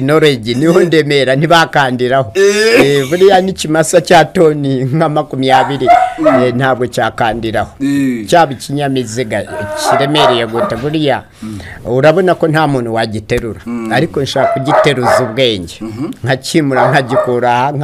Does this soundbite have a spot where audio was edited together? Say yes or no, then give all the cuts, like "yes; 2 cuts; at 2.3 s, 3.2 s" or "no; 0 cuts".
no; 0 cuts